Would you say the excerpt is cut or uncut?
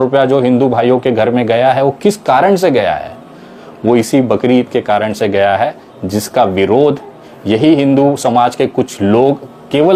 uncut